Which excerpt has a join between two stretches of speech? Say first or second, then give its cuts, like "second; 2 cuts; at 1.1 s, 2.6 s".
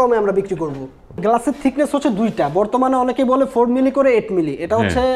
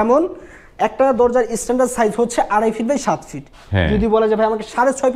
first; 1 cut; at 1.2 s